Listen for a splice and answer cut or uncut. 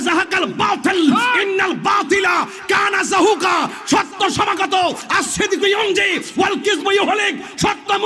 uncut